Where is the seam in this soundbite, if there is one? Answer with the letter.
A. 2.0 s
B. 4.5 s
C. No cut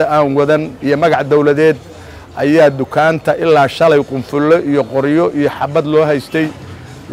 C